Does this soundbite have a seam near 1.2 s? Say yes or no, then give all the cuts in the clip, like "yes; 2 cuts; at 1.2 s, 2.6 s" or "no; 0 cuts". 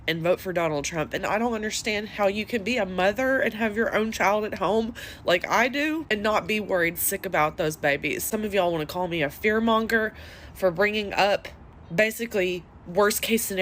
yes; 1 cut; at 1.2 s